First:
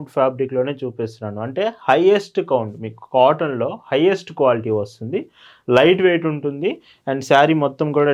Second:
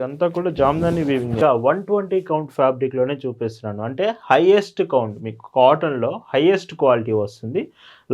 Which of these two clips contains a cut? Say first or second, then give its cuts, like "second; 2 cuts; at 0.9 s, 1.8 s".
second; 1 cut; at 1.4 s